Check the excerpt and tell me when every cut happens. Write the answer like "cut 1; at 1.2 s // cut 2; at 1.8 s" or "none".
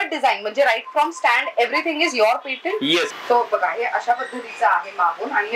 cut 1; at 3.1 s